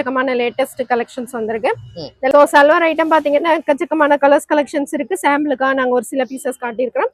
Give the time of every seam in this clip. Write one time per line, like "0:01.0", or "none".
0:02.3